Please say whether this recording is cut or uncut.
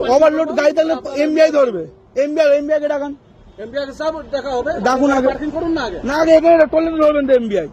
uncut